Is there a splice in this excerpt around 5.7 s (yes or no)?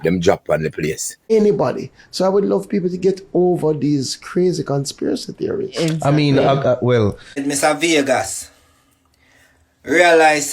no